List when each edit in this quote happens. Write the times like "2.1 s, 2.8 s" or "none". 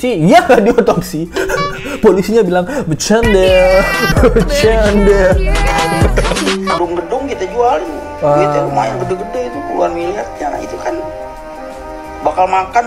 6.8 s